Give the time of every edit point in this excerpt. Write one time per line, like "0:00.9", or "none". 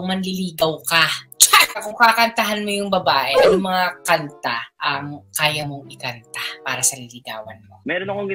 0:01.9